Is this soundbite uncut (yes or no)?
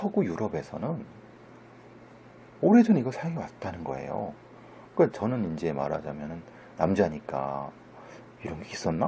no